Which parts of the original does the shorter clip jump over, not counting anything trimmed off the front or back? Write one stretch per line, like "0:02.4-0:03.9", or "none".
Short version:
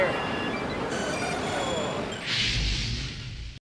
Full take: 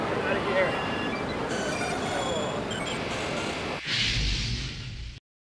0:02.8-0:03.8